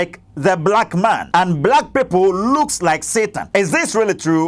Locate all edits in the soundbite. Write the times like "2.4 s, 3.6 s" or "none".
1.2 s, 3.4 s